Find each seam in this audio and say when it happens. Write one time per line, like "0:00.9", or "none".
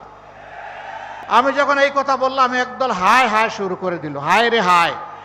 0:01.1